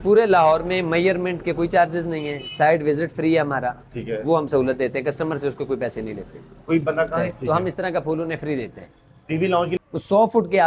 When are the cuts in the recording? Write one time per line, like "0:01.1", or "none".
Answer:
0:07.2
0:09.7